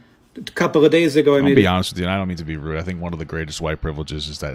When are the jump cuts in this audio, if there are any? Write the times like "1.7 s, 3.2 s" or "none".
none